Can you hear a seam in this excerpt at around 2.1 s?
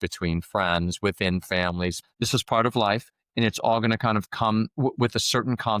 yes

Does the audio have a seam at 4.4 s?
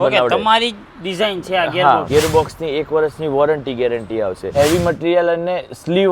yes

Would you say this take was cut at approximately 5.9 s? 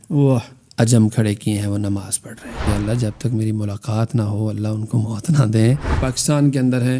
yes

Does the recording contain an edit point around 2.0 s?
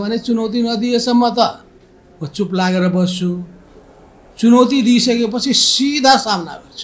no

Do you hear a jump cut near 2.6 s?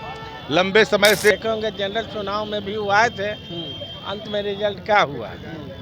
no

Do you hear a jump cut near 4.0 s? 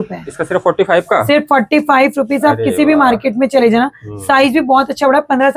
no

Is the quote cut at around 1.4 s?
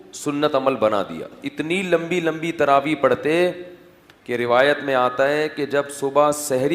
yes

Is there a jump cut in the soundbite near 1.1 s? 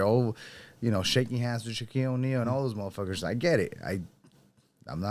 no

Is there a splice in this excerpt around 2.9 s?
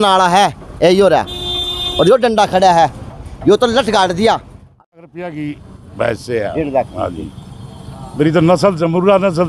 no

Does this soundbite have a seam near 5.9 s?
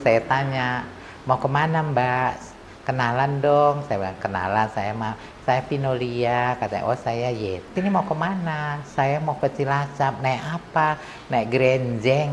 no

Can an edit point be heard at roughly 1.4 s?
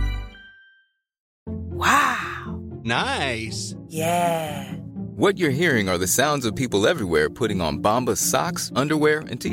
yes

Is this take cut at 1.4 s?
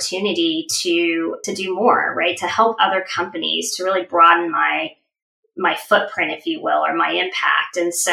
yes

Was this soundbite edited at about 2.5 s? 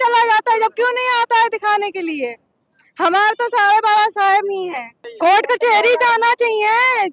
no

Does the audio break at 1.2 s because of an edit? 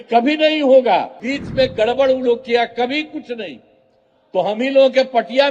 yes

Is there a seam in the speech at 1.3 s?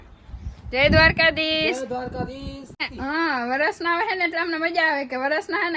no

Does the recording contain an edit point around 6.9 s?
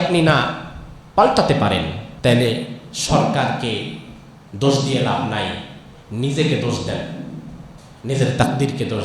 no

